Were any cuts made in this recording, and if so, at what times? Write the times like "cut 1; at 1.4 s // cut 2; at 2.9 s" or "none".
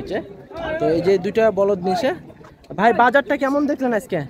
none